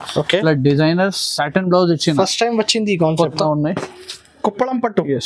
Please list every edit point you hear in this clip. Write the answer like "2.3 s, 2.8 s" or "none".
3.4 s